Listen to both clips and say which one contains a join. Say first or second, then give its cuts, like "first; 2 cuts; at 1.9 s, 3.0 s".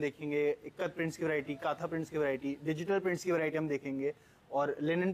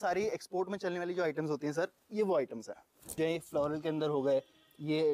second; 1 cut; at 3.2 s